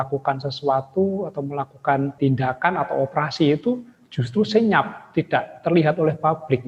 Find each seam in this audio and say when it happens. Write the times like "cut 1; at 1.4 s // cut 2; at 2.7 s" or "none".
cut 1; at 2.2 s